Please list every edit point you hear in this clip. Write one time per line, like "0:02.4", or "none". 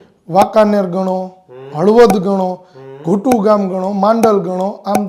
none